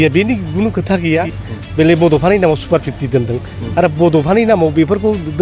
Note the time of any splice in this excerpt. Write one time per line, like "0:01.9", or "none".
none